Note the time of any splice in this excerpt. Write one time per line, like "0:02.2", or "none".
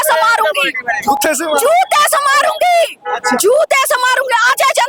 none

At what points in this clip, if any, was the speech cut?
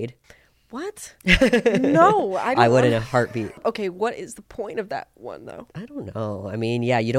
0:03.6
0:05.7

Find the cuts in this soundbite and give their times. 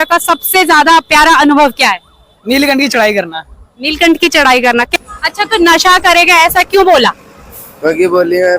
0:04.9

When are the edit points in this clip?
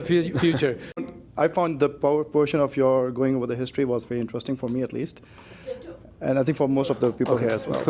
0:01.0

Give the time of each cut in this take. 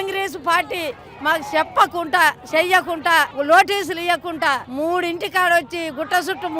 0:03.3
0:04.7

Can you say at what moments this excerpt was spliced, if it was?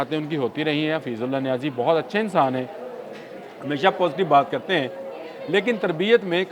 none

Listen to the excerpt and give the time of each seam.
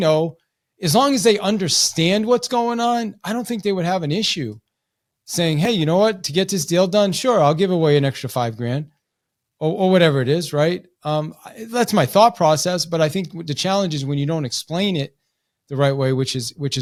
none

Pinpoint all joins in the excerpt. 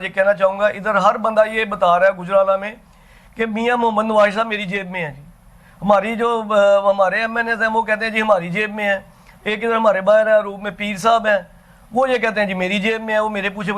none

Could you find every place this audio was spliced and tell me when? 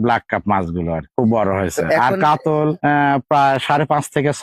none

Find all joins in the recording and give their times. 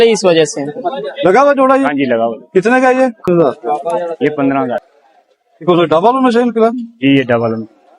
0:01.1
0:05.0

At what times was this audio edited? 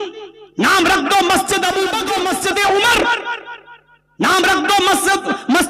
0:02.0

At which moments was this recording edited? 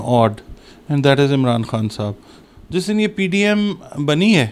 none

